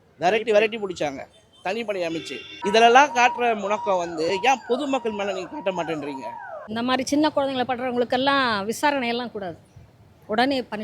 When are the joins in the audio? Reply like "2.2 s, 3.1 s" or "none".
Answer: 2.6 s, 6.6 s